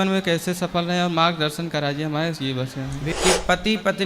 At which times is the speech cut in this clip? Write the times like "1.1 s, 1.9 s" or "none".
3.1 s